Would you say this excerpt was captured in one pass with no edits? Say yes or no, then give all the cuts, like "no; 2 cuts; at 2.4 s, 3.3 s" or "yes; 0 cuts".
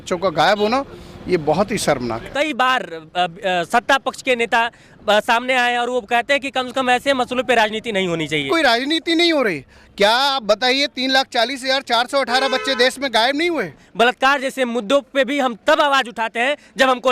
no; 3 cuts; at 2.3 s, 8.5 s, 13.8 s